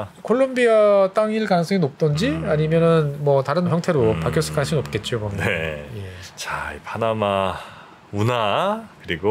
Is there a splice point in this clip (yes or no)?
no